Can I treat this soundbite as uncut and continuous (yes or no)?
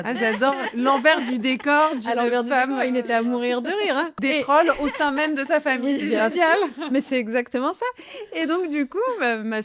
no